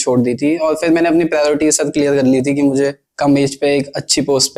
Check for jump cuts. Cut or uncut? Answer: uncut